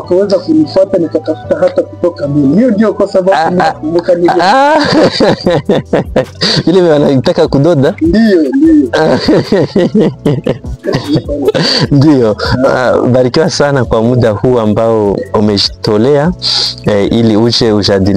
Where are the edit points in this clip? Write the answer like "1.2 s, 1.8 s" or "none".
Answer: none